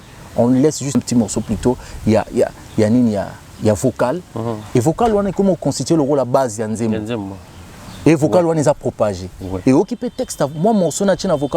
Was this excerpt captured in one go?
no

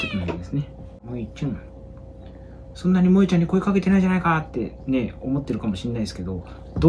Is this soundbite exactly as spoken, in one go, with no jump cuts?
no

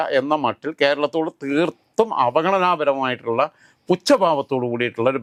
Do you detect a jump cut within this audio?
no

